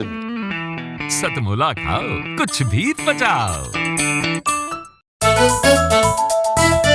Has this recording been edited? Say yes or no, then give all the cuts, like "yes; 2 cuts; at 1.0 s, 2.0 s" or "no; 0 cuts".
yes; 1 cut; at 5.0 s